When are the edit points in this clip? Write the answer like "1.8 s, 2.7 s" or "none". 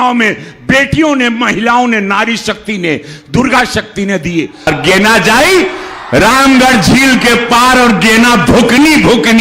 4.7 s